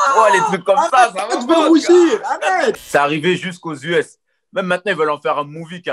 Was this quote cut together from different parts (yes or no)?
yes